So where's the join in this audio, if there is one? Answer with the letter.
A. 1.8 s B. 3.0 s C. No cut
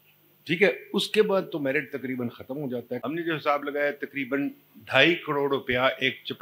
B